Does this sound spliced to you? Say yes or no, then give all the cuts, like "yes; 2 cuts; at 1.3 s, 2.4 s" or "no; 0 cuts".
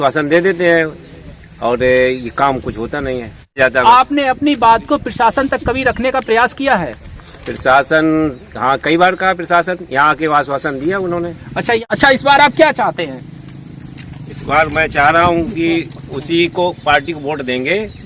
yes; 2 cuts; at 3.5 s, 11.8 s